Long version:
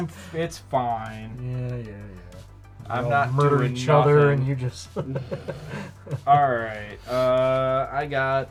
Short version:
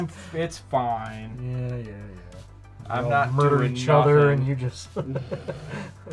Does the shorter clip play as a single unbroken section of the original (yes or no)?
yes